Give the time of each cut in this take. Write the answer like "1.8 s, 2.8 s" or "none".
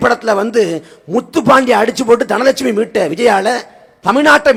none